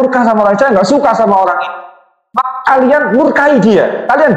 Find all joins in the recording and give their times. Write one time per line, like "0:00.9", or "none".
0:02.3

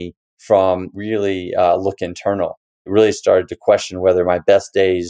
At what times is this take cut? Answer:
0:01.0
0:02.9

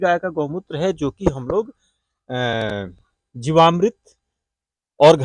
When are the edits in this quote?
none

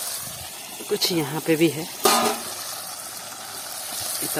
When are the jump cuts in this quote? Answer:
none

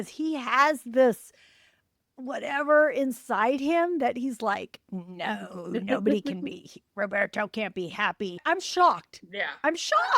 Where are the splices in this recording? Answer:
0:08.4

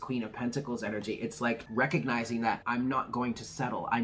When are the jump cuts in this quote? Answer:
0:01.7
0:02.6

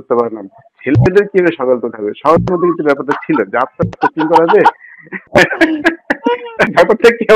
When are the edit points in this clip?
none

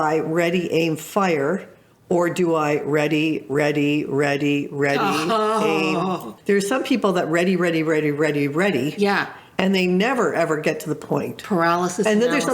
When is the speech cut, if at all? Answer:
0:06.3

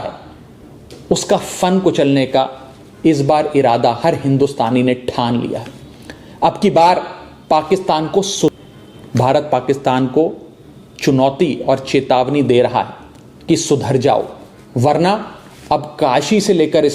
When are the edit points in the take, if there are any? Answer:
0:08.6

